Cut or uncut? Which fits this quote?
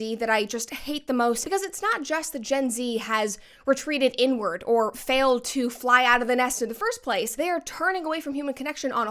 cut